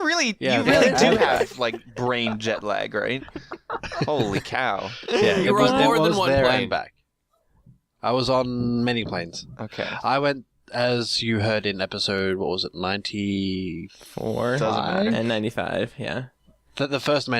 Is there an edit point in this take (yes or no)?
yes